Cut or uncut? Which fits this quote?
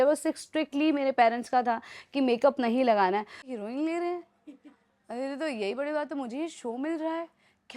cut